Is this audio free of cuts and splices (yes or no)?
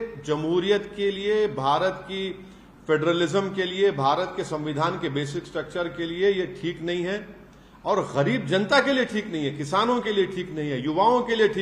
yes